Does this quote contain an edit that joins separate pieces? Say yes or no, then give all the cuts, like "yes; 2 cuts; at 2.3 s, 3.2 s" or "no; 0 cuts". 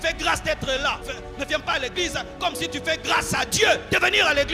yes; 1 cut; at 1.1 s